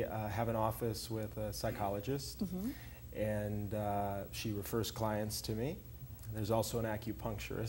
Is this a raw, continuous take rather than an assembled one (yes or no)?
no